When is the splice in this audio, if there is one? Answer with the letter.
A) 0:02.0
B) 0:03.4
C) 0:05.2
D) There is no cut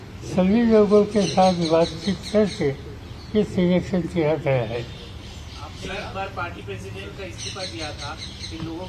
D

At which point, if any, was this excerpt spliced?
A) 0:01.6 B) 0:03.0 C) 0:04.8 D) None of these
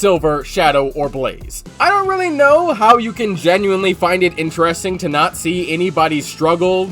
A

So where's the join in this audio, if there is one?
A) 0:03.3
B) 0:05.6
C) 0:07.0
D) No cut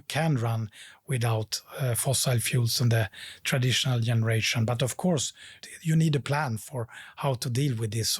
B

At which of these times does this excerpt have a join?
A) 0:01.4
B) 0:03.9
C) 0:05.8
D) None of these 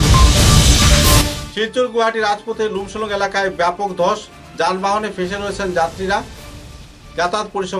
A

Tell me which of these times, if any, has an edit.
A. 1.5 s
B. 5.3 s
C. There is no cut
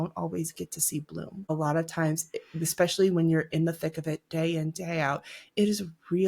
A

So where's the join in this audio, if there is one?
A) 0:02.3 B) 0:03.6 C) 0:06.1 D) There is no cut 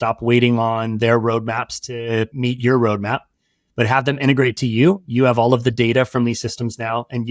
A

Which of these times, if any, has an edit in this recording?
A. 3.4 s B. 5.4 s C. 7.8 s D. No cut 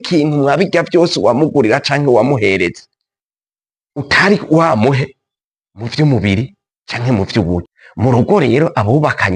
C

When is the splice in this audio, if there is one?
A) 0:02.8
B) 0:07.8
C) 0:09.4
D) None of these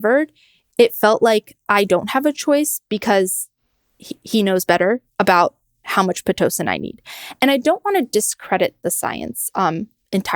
D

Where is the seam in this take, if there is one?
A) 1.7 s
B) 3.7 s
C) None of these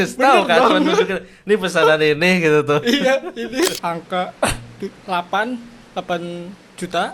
B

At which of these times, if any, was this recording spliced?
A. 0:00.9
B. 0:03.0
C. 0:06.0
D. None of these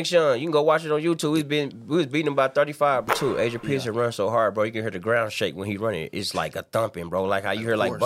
B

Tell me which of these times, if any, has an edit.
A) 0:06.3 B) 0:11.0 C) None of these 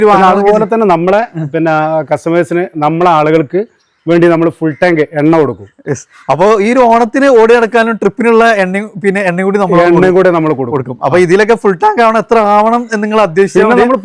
C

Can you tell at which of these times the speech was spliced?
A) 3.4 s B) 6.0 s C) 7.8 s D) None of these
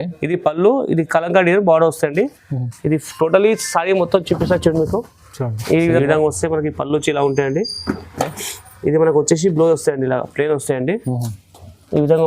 B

